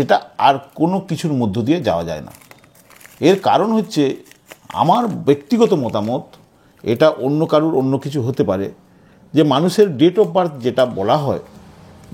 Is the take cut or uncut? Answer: uncut